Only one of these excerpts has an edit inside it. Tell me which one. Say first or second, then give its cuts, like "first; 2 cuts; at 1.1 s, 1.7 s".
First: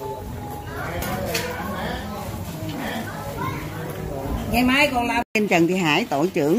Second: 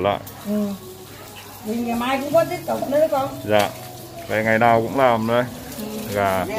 first; 1 cut; at 5.3 s